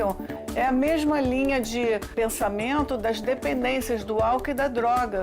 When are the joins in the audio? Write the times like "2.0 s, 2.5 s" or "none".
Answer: 2.1 s